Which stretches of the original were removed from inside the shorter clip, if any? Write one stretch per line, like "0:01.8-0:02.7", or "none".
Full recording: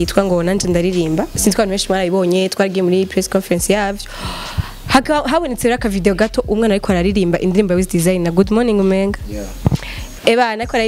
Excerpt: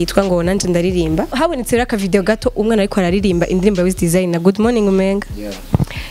0:01.3-0:05.3